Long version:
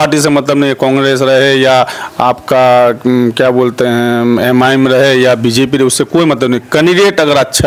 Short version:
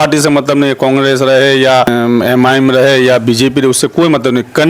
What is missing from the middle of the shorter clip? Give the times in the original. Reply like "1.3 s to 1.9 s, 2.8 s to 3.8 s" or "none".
1.9 s to 4.1 s